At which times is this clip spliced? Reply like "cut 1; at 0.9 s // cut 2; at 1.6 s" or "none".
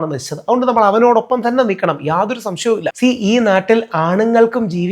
cut 1; at 2.9 s